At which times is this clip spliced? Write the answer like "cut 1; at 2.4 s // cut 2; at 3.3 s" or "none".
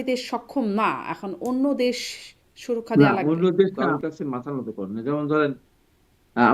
cut 1; at 3.9 s